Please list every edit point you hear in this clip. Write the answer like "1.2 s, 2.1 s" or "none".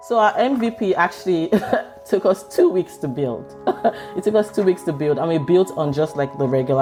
none

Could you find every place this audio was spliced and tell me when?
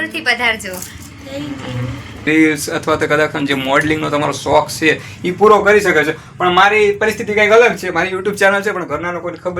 2.3 s

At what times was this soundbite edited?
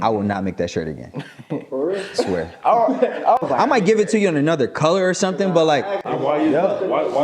3.4 s, 6.0 s

